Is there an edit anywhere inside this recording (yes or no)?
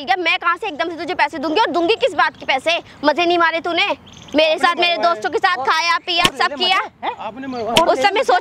no